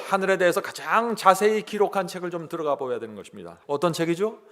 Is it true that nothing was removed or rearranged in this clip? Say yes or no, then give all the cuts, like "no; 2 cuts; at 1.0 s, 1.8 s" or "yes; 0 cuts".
no; 1 cut; at 3.5 s